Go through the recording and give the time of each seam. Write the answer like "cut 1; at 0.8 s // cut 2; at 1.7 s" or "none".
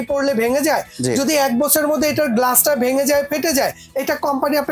none